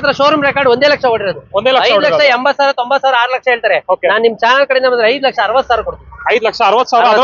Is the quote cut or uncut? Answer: uncut